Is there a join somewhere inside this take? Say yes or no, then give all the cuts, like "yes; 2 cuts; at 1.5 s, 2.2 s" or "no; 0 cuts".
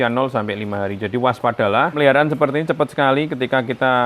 yes; 1 cut; at 2.0 s